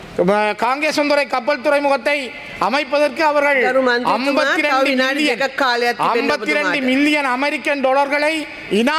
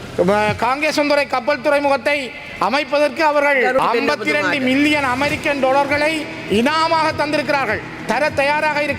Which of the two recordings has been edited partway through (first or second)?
second